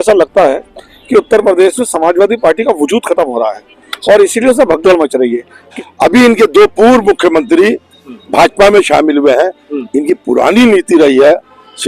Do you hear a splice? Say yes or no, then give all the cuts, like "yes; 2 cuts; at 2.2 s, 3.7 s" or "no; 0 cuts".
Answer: yes; 1 cut; at 5.7 s